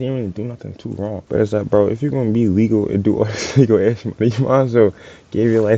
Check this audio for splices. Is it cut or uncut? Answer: cut